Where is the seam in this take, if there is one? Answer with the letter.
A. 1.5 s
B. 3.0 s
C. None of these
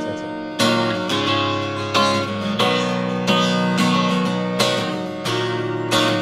C